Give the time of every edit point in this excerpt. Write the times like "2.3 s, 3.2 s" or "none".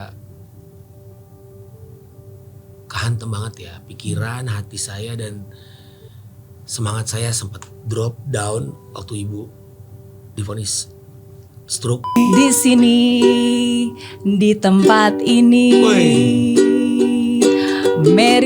12.2 s